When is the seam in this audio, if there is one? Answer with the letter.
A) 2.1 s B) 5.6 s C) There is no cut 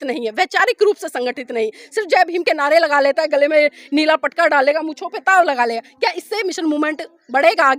C